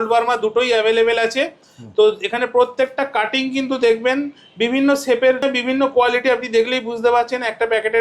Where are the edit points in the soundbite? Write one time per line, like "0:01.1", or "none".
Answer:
0:05.4

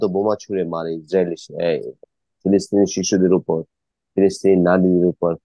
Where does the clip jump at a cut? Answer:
none

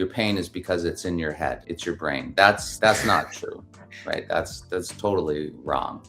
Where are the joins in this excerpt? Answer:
0:01.7
0:02.7

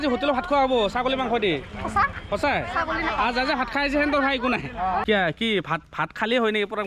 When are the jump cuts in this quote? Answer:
0:05.0

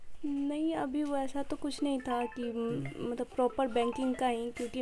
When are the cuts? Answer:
none

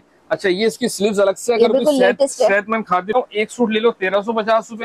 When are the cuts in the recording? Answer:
0:03.1

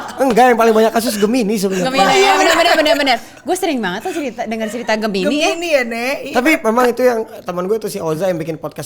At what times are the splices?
none

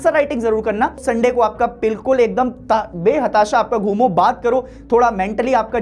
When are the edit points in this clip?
0:01.0

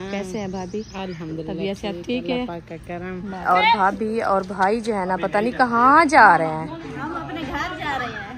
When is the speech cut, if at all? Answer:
0:03.4

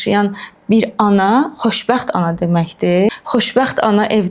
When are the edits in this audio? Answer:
0:03.1

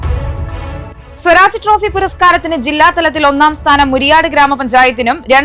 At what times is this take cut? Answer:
0:01.0

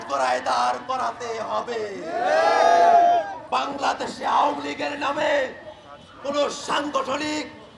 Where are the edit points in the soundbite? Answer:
0:03.4

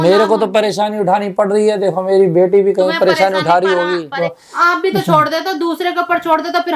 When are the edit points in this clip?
0:04.3

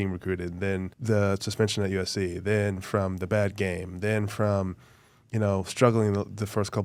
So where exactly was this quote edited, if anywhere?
0:00.9

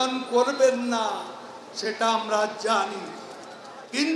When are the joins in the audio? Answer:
none

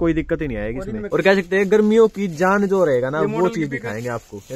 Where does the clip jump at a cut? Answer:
0:01.0

